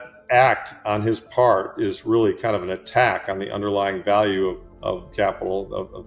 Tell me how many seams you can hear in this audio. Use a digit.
1